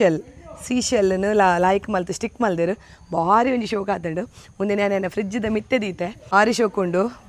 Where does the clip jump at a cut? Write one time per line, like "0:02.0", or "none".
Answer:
0:06.3